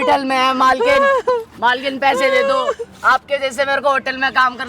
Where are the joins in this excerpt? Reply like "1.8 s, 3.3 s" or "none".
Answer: none